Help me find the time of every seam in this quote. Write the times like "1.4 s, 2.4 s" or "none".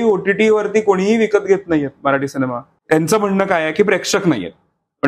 2.7 s